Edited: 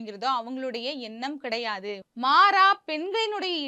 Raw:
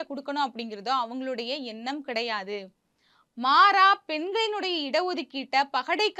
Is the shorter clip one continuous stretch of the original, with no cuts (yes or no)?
no